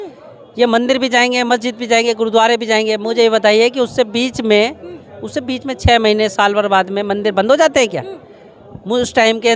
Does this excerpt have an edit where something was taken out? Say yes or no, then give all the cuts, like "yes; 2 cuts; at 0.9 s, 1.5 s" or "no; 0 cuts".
no; 0 cuts